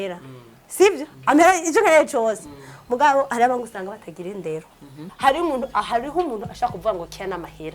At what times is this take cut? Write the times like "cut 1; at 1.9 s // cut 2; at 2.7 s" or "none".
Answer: cut 1; at 5.0 s